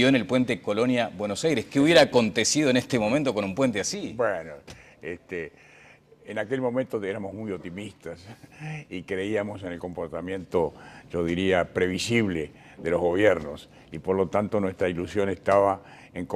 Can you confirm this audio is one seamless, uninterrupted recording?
no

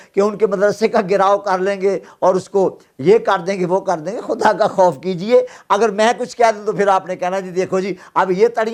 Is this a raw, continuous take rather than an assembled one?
yes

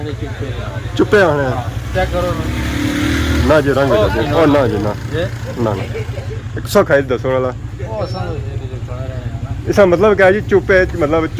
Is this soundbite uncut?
yes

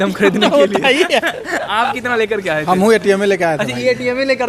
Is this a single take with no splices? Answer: yes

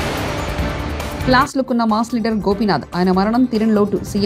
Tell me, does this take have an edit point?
yes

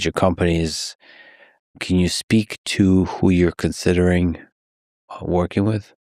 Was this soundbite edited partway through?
no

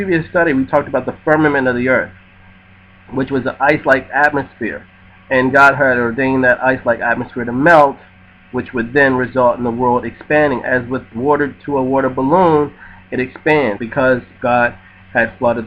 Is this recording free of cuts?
yes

